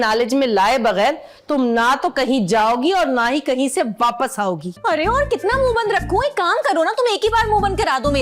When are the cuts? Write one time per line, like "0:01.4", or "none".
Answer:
0:04.7